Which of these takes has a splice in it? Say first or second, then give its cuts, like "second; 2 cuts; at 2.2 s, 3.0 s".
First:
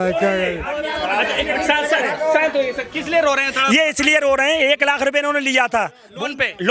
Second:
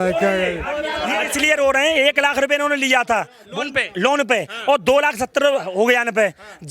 second; 1 cut; at 1.3 s